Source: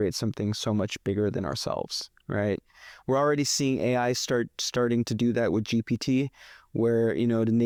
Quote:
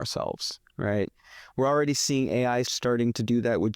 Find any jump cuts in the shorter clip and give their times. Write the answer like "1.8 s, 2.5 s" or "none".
2.7 s